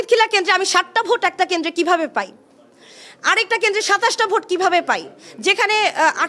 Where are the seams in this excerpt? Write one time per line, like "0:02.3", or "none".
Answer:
none